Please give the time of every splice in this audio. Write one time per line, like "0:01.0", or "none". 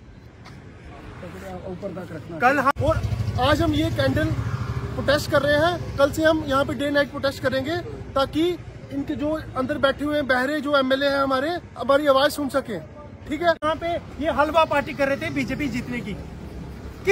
0:02.8
0:13.6